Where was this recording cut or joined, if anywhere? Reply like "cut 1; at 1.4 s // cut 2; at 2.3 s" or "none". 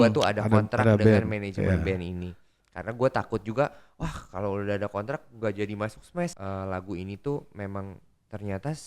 cut 1; at 6.4 s